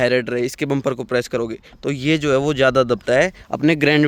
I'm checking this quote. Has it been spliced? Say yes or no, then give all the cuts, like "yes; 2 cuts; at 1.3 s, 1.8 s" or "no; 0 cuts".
no; 0 cuts